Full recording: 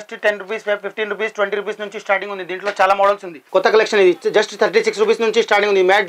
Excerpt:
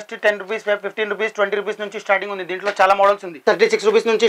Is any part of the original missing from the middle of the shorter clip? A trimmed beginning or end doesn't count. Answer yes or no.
yes